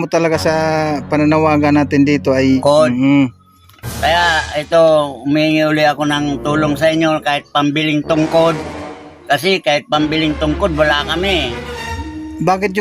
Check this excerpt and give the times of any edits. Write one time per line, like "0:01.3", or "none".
0:02.6